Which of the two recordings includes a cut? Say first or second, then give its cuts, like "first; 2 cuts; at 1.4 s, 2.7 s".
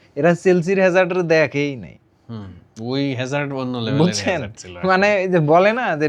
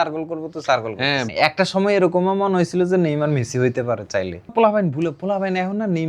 second; 2 cuts; at 1.3 s, 4.5 s